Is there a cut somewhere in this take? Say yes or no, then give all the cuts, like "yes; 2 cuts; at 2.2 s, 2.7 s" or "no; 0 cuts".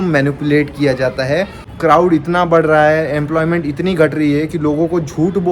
yes; 1 cut; at 1.6 s